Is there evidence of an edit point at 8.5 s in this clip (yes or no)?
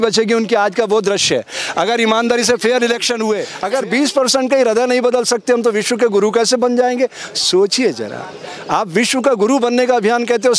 no